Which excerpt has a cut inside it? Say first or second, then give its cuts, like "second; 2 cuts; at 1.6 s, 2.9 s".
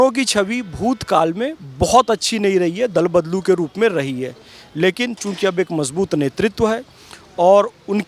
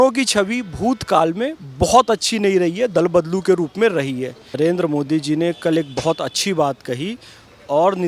second; 1 cut; at 4.5 s